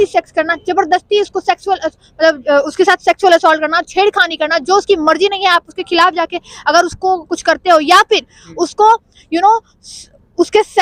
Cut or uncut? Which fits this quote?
uncut